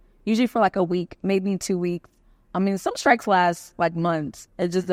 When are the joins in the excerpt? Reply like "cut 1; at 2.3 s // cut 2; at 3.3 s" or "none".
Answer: none